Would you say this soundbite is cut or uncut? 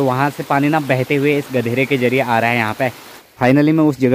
cut